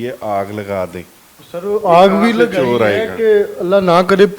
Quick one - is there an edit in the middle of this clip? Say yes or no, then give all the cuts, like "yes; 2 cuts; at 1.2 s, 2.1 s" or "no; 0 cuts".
no; 0 cuts